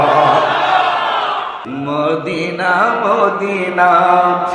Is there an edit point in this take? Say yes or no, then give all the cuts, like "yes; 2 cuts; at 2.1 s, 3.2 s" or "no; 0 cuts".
yes; 1 cut; at 1.6 s